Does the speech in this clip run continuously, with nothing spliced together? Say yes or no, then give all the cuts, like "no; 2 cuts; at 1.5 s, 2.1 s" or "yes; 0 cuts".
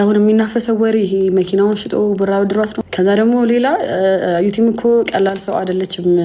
no; 1 cut; at 2.7 s